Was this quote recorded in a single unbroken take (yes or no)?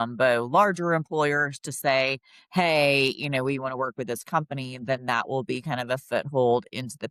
yes